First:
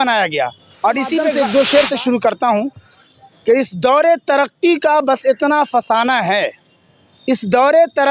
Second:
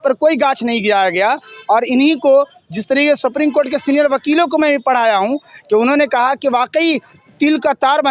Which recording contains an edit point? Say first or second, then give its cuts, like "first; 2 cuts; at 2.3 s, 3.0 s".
first; 1 cut; at 1.4 s